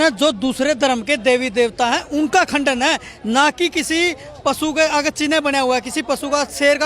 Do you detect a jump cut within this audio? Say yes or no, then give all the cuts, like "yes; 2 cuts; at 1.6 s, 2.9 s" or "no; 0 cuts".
no; 0 cuts